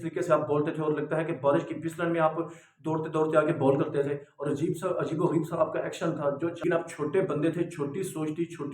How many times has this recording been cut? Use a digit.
1